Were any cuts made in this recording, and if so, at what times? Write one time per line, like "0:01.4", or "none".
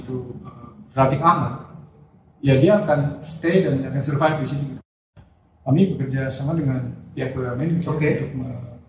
0:04.8